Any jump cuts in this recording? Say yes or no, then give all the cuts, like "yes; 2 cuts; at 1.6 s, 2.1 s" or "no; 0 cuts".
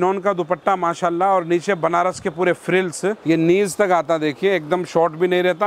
yes; 1 cut; at 3.2 s